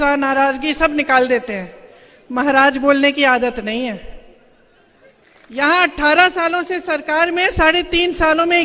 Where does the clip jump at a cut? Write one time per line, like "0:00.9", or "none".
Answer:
0:05.2